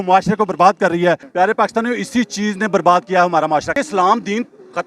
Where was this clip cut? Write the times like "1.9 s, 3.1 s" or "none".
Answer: 1.3 s, 3.7 s